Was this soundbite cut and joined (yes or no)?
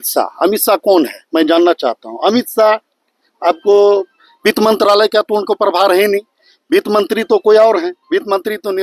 no